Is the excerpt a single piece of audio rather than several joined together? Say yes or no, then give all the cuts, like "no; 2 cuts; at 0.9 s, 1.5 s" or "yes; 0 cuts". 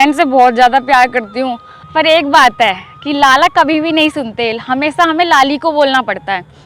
no; 1 cut; at 1.7 s